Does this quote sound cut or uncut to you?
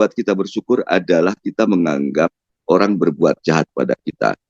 uncut